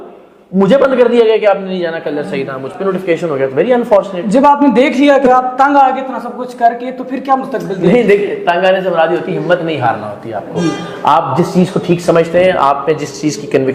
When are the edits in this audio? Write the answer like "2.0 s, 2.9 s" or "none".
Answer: none